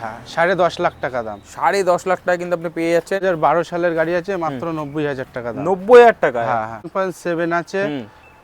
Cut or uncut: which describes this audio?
cut